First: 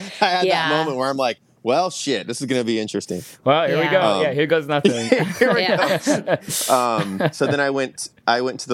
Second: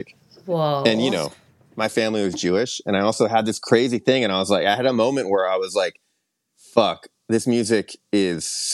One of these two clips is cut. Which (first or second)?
second